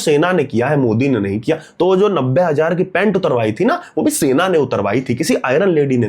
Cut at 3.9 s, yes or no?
no